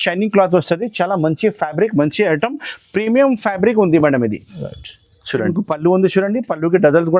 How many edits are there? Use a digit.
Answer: 1